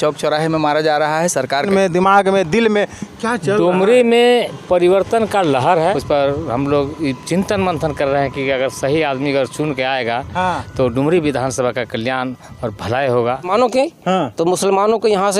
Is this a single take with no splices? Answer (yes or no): no